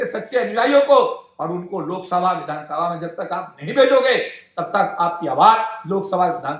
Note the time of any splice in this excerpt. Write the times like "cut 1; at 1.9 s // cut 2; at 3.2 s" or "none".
none

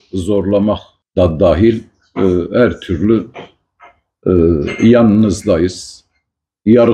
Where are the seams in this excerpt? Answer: cut 1; at 0.9 s

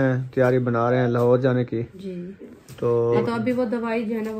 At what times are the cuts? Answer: cut 1; at 2.0 s

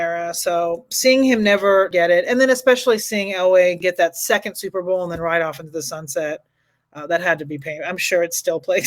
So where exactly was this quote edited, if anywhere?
cut 1; at 1.9 s // cut 2; at 3.8 s

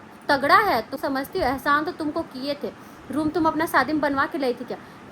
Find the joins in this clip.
cut 1; at 0.9 s

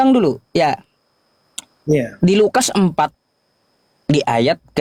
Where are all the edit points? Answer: none

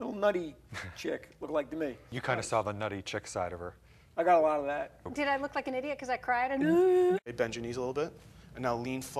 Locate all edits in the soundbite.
cut 1; at 2.1 s // cut 2; at 5.0 s // cut 3; at 7.2 s

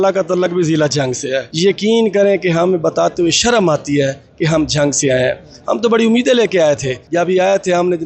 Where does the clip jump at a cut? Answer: cut 1; at 1.5 s // cut 2; at 7.0 s

